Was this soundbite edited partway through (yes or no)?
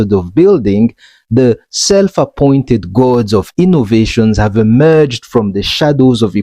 no